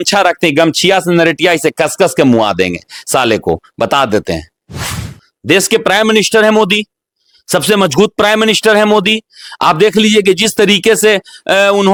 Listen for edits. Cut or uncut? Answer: uncut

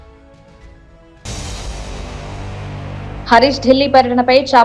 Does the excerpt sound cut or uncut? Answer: cut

